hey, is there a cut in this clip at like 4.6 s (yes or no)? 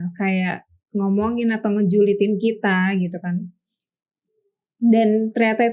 no